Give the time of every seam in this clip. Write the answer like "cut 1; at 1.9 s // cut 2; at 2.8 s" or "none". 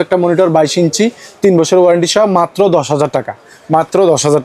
none